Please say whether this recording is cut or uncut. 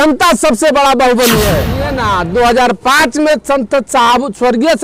cut